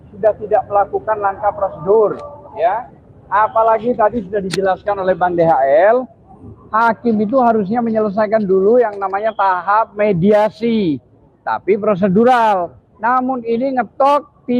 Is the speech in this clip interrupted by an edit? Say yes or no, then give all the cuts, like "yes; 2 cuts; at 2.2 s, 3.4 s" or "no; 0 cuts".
no; 0 cuts